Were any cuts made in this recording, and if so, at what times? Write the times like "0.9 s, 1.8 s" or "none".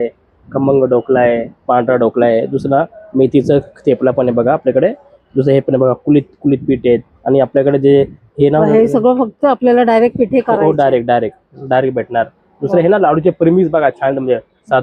none